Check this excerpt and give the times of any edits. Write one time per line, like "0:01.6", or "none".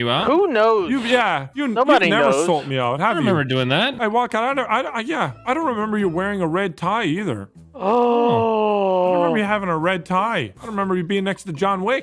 0:01.5
0:03.9
0:10.6